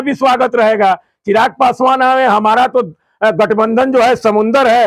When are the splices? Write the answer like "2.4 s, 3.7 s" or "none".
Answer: none